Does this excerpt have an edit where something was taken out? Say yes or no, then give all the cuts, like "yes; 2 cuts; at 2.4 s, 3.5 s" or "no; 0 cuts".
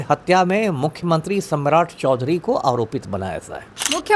no; 0 cuts